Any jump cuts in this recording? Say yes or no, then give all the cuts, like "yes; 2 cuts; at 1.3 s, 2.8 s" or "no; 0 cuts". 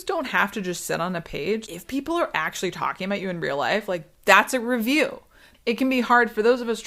yes; 2 cuts; at 1.6 s, 5.4 s